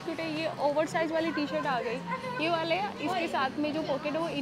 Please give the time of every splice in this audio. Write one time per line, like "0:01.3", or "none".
none